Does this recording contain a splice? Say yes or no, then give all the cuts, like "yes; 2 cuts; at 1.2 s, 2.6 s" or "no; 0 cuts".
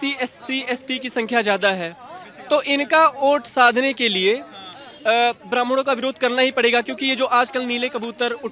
no; 0 cuts